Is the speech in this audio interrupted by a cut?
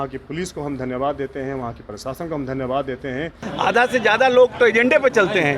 yes; 1 cut; at 3.4 s

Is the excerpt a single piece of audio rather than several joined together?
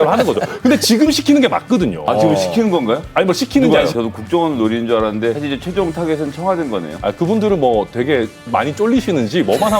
no; 2 cuts; at 3.9 s, 5.4 s

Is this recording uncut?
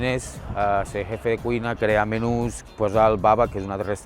no; 1 cut; at 2.7 s

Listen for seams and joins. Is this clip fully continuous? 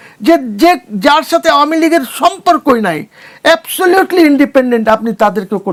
yes; 0 cuts

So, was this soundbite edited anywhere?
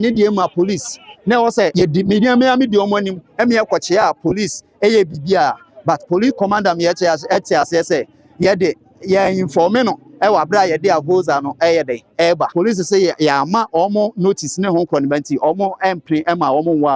yes; 2 cuts; at 1.7 s, 12.5 s

